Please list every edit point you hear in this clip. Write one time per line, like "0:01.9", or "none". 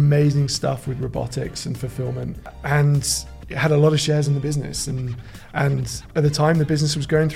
0:02.6